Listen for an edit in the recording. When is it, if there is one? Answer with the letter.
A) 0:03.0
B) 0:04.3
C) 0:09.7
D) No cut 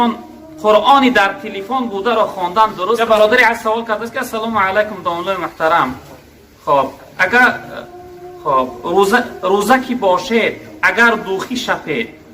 A